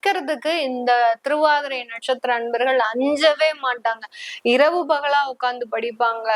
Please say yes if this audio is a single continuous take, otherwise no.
yes